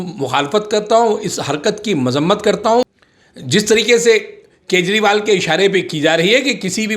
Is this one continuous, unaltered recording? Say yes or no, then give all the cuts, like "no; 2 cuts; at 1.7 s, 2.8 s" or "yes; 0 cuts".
no; 1 cut; at 2.8 s